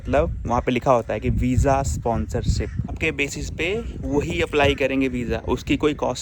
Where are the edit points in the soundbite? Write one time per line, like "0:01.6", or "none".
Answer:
0:02.9